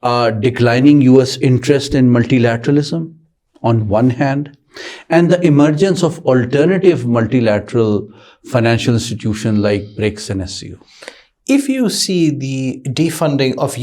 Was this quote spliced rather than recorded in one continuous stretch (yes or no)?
no